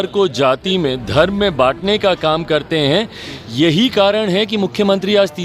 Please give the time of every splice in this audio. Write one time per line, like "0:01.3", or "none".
none